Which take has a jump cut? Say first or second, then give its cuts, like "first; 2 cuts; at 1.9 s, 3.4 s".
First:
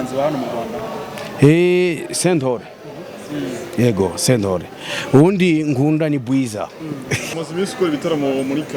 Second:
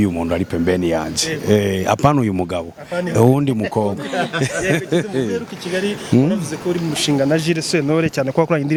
first; 1 cut; at 7.3 s